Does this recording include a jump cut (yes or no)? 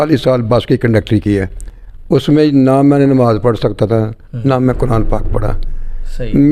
no